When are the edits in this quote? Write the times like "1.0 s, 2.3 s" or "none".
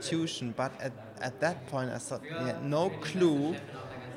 none

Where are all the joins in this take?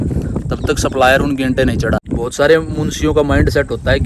2.0 s

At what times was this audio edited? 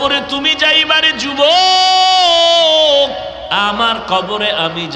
3.4 s

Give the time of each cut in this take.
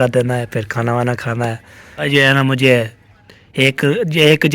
2.1 s

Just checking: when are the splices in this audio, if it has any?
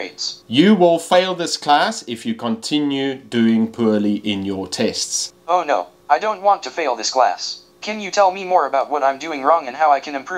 none

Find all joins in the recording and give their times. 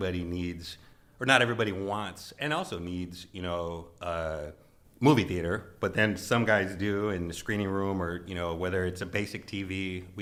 none

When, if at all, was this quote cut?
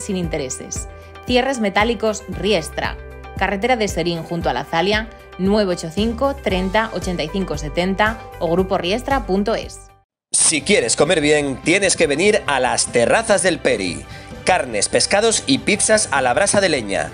none

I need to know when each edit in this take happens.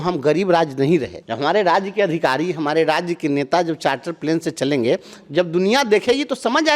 1.2 s

